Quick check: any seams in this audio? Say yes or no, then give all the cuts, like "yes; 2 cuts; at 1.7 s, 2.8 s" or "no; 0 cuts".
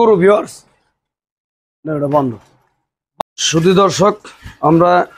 yes; 1 cut; at 3.1 s